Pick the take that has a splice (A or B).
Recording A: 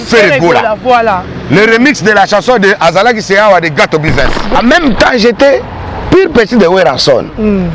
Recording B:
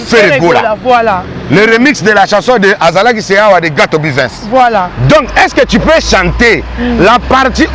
A